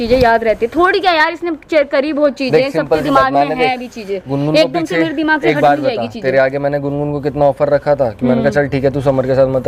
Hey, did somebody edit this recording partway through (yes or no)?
no